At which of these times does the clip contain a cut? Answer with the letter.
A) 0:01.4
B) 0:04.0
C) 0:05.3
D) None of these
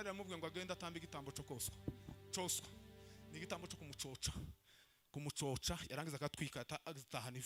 D